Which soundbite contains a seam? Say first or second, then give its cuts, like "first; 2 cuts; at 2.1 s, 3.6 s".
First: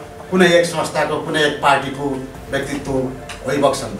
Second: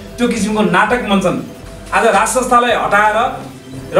second; 1 cut; at 1.6 s